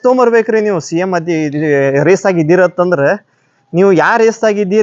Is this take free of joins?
yes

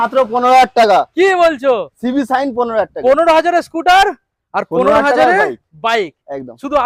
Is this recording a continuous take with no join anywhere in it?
yes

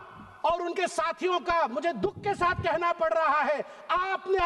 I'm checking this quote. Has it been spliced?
no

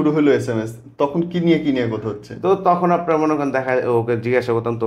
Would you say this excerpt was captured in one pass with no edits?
yes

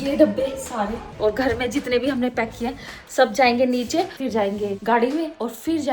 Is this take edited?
yes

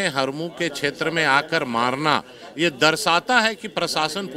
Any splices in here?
no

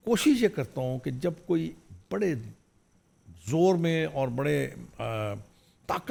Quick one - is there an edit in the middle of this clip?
no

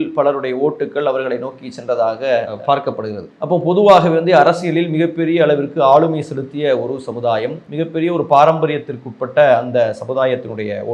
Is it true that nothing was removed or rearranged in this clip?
no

